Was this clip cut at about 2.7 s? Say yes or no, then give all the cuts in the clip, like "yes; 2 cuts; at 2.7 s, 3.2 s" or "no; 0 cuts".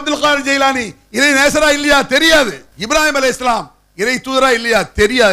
yes; 1 cut; at 2.7 s